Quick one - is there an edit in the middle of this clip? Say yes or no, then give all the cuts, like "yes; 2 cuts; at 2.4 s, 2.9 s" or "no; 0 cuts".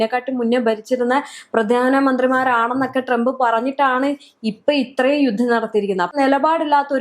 yes; 1 cut; at 6.1 s